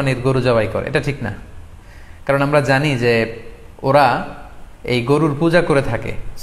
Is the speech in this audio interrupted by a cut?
no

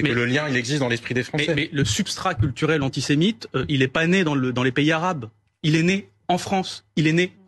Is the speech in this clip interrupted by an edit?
yes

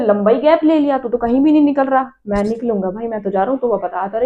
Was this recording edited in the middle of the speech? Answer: no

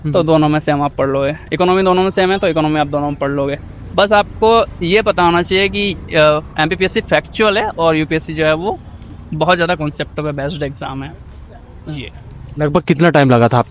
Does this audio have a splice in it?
no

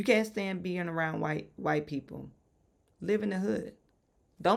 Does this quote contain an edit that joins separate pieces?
no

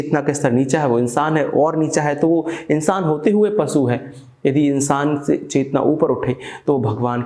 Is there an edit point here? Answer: no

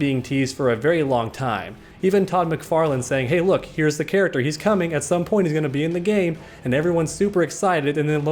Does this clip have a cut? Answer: no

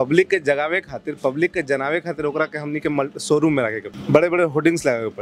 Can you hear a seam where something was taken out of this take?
yes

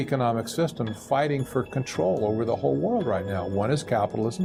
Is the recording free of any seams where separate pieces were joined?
yes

